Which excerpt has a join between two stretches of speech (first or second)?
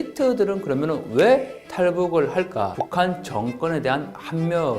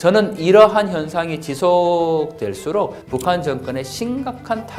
first